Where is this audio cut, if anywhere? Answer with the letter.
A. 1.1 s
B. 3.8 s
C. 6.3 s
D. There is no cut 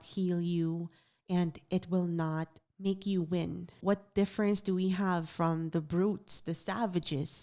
B